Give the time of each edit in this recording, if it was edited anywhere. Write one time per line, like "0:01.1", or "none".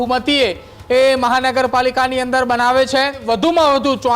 0:03.2

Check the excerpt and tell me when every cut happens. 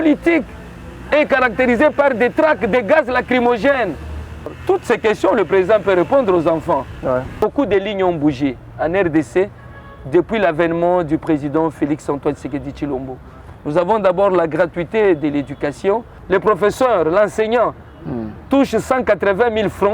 0:04.6
0:07.3
0:16.1

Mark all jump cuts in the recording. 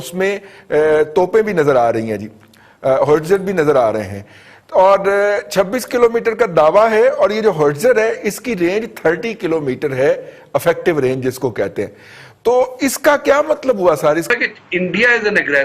0:14.3

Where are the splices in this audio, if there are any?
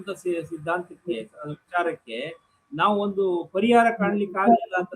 none

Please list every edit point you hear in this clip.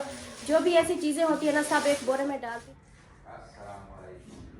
0:02.4

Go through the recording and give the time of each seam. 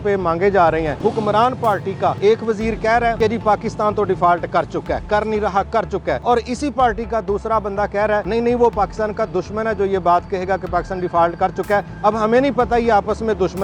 0:01.0
0:02.2
0:03.2
0:06.2
0:08.3

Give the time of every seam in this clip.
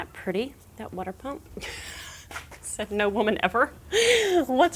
none

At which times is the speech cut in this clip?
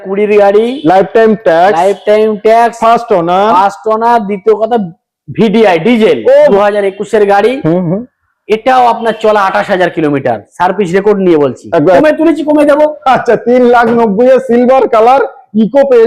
0:06.5
0:12.0

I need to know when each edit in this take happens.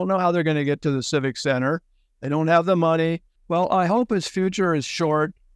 0:03.3

